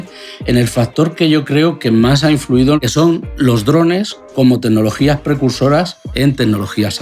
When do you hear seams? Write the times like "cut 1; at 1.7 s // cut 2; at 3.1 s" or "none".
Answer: cut 1; at 2.8 s // cut 2; at 6.0 s